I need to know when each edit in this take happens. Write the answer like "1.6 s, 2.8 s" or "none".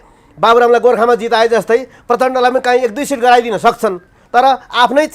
none